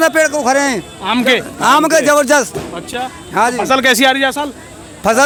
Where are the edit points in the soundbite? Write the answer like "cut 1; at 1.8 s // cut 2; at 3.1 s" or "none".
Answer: none